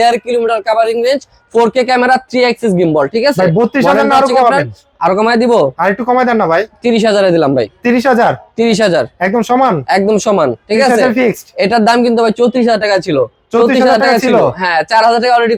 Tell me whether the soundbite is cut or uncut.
uncut